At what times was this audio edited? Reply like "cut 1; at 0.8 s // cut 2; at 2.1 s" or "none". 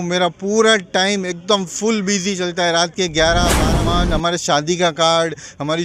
cut 1; at 3.6 s